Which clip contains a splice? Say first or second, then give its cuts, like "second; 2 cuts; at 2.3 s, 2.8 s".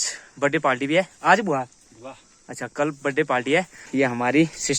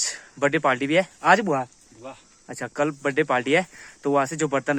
first; 1 cut; at 3.8 s